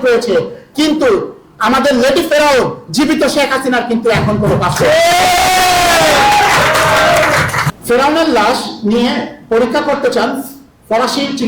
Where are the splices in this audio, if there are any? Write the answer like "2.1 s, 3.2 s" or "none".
7.7 s